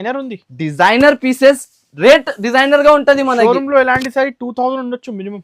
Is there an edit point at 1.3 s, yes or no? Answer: no